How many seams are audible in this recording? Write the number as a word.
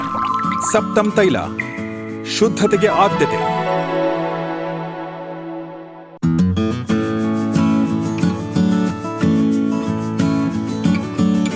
zero